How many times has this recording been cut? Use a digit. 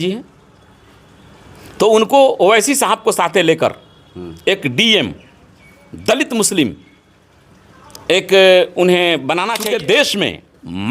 1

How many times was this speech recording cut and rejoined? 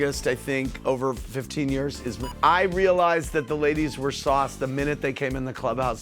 1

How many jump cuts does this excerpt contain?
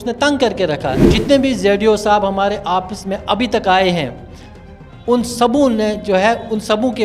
1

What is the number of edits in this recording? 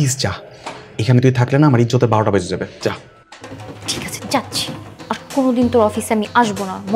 0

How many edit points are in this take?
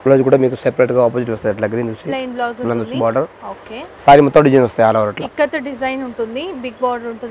0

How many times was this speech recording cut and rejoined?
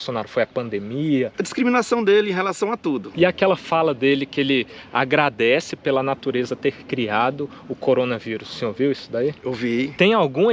2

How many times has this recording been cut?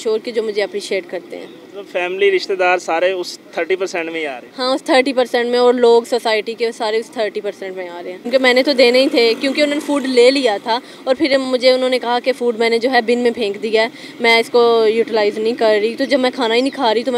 1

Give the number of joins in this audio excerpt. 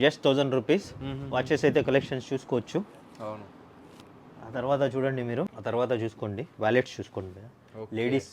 1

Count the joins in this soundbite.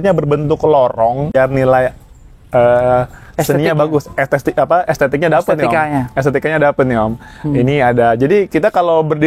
1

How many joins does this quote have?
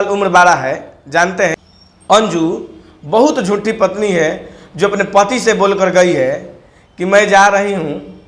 1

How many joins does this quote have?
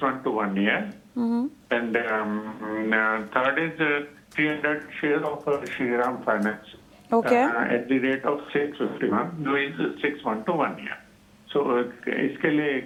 0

